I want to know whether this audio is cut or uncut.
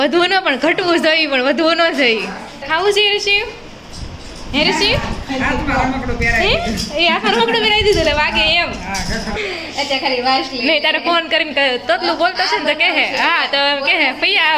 cut